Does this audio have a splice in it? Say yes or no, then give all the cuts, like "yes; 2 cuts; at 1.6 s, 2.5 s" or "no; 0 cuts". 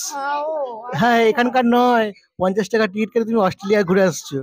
no; 0 cuts